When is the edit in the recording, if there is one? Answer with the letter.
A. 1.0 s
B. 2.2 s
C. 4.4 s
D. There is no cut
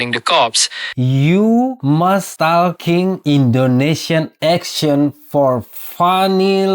A